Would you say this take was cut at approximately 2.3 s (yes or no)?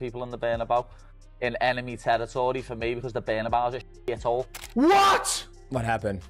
no